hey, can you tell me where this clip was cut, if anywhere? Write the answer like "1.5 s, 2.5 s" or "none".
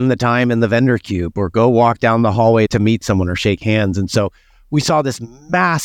2.7 s